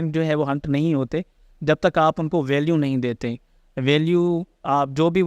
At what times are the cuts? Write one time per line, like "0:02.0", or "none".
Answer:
none